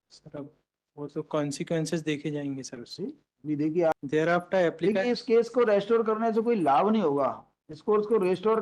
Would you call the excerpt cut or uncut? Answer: cut